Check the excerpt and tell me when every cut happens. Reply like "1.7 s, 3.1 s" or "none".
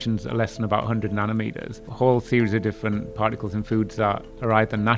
1.8 s